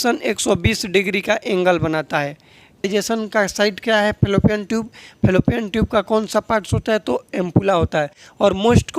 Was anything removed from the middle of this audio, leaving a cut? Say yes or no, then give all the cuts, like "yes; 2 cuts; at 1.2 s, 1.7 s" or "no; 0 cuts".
yes; 1 cut; at 2.9 s